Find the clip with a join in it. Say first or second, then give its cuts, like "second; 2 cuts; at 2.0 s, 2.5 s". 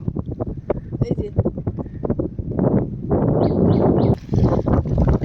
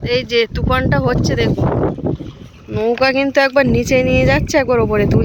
first; 1 cut; at 4.2 s